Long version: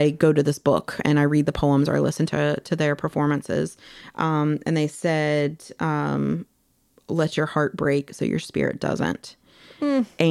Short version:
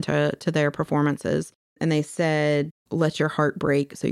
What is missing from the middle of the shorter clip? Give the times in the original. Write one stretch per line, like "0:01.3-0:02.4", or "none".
0:04.0-0:04.6
0:05.6-0:07.0